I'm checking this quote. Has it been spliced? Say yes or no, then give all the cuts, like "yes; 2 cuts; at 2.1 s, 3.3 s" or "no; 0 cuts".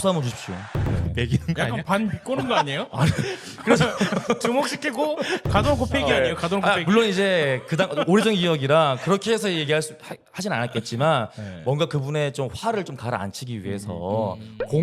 no; 0 cuts